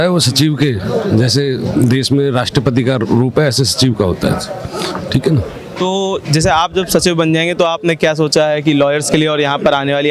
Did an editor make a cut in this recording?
no; 0 cuts

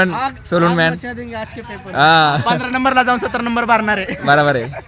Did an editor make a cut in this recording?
no; 0 cuts

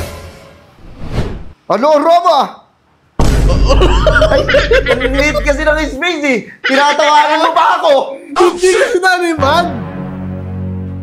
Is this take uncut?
yes; 0 cuts

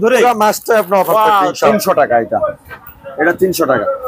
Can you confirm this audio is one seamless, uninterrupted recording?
no; 1 cut; at 1.7 s

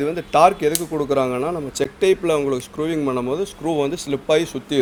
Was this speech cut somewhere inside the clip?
no; 0 cuts

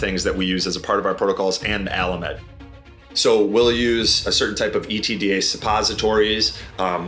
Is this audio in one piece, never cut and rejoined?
no; 1 cut; at 2.8 s

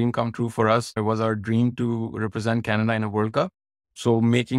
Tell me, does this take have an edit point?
yes; 1 cut; at 0.9 s

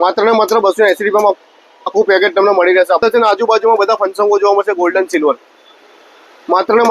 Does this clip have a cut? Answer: yes; 1 cut; at 3.0 s

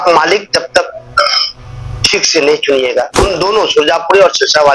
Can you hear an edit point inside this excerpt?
yes; 1 cut; at 3.2 s

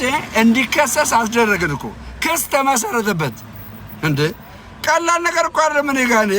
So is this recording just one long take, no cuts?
yes; 0 cuts

